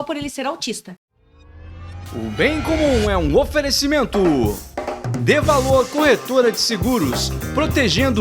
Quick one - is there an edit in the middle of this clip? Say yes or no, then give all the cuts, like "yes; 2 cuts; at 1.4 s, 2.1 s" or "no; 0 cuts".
yes; 1 cut; at 1.0 s